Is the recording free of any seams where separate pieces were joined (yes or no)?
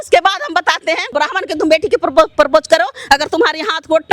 no